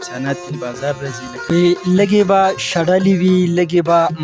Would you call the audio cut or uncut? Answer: cut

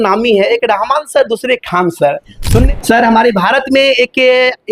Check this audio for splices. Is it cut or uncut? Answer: cut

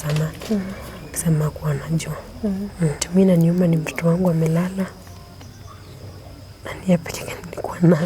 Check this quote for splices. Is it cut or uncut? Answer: cut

